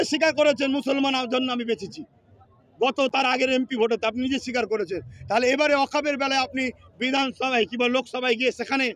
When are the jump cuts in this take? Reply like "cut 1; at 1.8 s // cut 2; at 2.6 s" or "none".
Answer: none